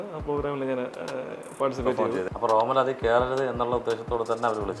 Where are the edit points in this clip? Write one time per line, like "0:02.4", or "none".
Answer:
0:02.3